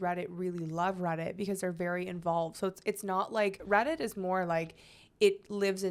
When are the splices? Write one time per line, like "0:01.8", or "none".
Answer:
0:03.6